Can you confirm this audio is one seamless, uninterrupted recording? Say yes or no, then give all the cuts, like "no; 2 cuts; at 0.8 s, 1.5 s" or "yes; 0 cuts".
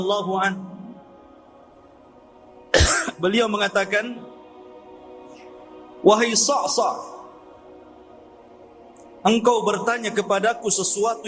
no; 6 cuts; at 1.3 s, 2.7 s, 4.6 s, 6.0 s, 7.3 s, 9.2 s